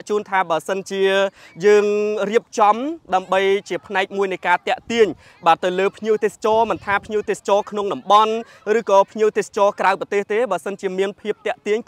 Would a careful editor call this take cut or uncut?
uncut